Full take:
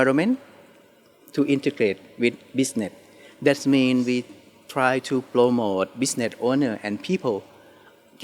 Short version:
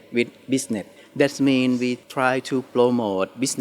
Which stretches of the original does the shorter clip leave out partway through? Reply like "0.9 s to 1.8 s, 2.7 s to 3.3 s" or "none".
3.0 s to 3.2 s, 4.3 s to 4.6 s